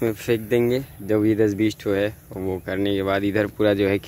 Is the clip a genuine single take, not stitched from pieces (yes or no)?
yes